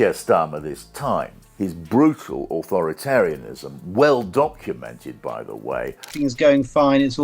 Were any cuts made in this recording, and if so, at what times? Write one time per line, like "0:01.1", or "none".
0:06.0

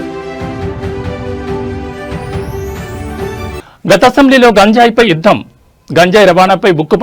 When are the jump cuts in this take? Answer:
0:03.2

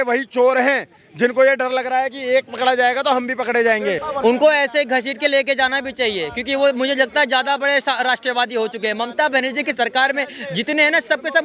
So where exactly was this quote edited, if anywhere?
none

